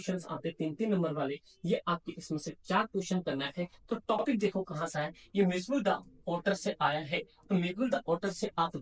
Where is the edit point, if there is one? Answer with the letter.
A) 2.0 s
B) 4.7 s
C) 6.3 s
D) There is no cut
D